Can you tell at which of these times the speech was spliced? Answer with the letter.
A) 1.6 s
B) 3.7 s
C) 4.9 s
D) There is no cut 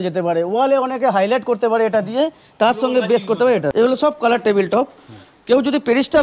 B